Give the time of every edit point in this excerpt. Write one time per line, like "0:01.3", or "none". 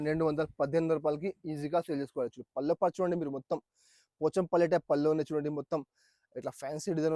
none